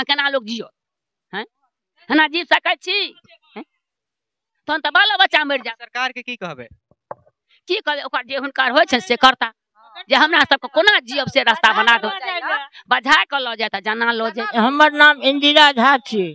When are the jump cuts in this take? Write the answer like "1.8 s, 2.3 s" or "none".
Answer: 14.5 s